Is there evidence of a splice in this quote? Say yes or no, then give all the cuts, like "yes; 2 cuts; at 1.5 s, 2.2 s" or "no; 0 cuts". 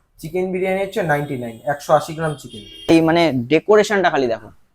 yes; 1 cut; at 2.9 s